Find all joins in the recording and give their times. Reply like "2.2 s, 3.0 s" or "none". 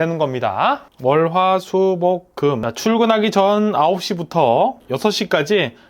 0.9 s, 2.7 s, 4.9 s